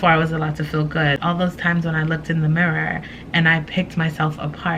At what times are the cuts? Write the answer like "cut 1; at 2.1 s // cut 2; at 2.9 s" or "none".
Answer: cut 1; at 1.2 s